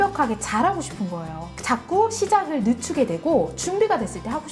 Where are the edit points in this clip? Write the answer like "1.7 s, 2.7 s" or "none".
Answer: none